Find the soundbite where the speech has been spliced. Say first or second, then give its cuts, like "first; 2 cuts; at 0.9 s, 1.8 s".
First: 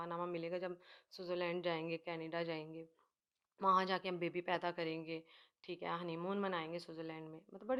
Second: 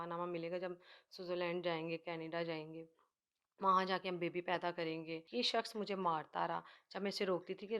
second; 1 cut; at 5.2 s